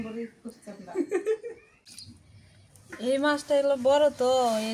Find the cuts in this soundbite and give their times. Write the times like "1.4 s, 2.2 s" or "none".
2.0 s